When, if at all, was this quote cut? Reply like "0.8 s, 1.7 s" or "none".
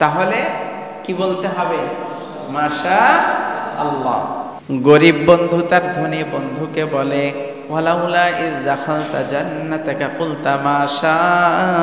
4.5 s